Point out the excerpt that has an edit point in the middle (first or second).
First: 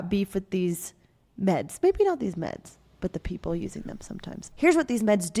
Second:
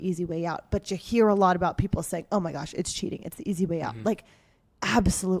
first